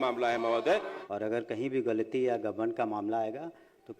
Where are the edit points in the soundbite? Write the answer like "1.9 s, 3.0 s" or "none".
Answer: 1.0 s